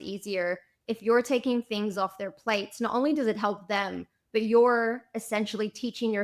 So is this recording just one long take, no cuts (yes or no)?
yes